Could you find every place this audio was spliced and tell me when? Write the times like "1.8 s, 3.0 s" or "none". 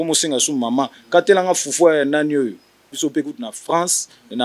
3.0 s